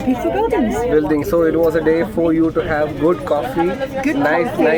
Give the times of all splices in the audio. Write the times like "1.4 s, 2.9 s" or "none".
none